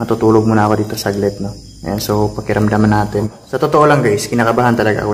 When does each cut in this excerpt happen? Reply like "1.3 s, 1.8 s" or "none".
3.4 s

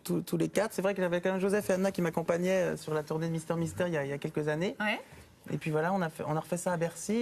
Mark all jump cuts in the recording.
none

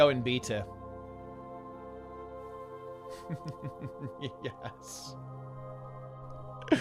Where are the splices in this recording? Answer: none

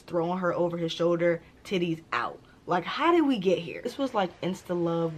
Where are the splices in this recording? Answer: 3.9 s

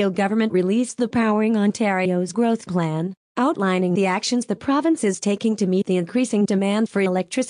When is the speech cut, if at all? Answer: 5.2 s

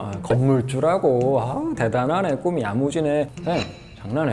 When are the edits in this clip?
3.4 s

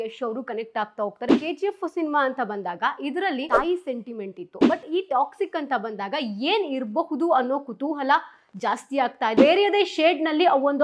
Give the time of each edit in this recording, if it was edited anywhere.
1.3 s, 3.5 s, 9.3 s

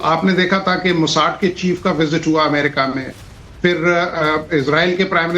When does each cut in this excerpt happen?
1.0 s

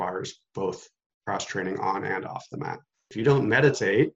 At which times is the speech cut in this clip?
1.1 s, 3.0 s

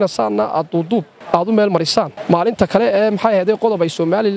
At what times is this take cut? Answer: 1.2 s, 2.2 s

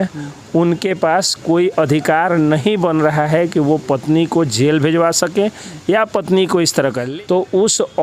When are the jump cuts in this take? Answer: 7.0 s

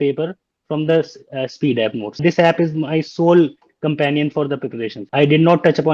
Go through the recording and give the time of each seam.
2.2 s, 5.0 s

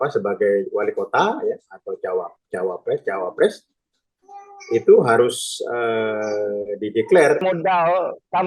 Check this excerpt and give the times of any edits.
7.4 s

